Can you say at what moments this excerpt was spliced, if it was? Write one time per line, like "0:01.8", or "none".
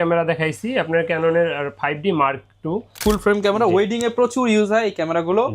0:03.0